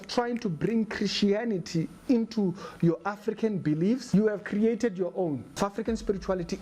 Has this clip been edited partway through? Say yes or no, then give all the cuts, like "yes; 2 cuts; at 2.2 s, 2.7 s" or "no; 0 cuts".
yes; 2 cuts; at 4.0 s, 5.6 s